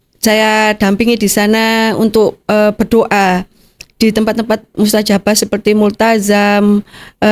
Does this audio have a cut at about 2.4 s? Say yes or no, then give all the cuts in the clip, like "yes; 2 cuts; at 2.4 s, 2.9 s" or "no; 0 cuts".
no; 0 cuts